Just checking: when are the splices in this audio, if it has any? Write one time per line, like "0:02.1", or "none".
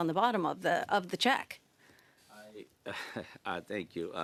none